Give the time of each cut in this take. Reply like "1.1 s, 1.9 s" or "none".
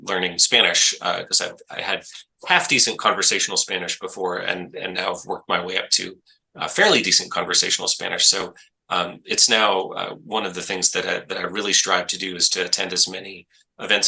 none